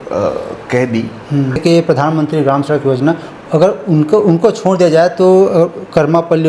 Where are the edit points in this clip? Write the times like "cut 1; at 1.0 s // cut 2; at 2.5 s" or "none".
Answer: cut 1; at 1.6 s